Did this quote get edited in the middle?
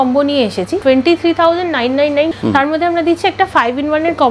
yes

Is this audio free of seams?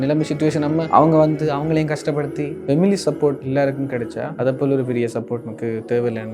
no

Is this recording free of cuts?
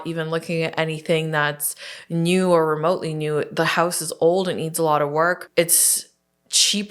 no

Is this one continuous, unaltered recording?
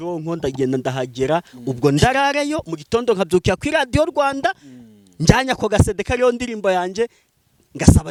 yes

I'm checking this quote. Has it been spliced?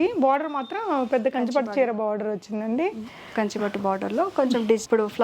no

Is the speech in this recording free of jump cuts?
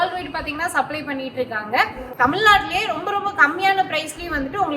yes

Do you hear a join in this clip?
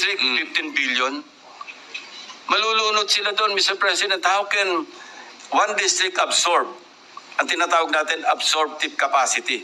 no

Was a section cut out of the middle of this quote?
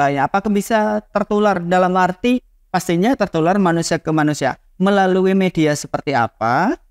no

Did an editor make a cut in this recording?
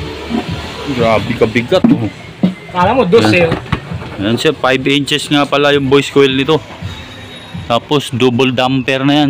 no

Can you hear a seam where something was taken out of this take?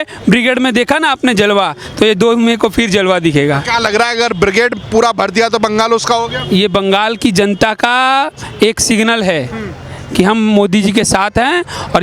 no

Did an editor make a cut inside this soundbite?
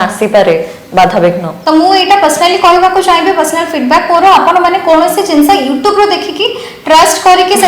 yes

